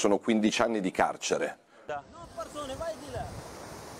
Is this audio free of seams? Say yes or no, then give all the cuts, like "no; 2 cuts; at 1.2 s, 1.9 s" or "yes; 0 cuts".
no; 1 cut; at 1.8 s